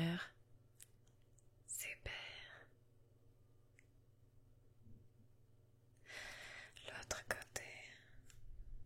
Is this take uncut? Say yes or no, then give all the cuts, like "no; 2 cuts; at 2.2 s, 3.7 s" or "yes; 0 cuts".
yes; 0 cuts